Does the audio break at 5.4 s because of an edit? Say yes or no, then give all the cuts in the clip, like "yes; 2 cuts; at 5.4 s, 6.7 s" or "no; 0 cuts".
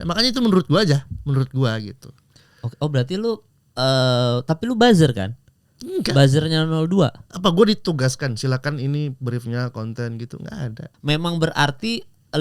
no; 1 cut; at 10.9 s